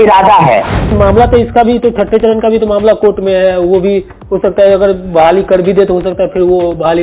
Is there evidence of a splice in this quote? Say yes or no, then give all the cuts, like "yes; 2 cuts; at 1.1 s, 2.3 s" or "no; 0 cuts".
yes; 1 cut; at 0.9 s